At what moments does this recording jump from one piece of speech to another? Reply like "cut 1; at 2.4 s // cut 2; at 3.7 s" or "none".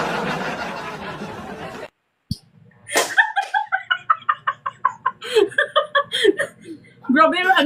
none